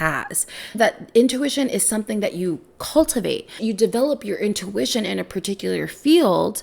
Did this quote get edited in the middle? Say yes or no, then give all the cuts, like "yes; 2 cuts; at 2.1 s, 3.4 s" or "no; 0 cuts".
yes; 1 cut; at 3.6 s